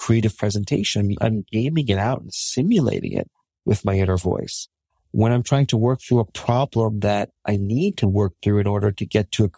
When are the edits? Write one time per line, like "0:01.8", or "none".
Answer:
0:01.2